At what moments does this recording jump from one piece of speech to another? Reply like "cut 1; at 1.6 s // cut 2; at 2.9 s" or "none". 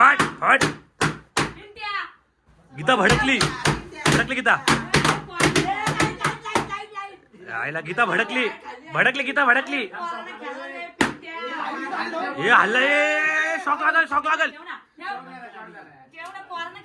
none